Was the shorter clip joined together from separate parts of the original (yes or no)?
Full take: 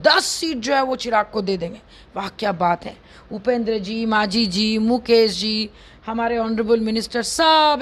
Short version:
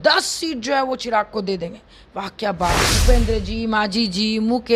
yes